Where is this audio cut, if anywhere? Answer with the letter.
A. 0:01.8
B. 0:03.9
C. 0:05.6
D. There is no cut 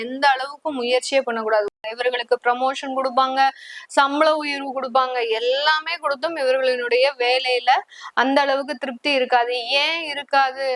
A